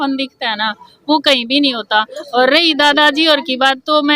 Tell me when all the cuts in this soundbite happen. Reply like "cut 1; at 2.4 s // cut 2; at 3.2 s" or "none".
none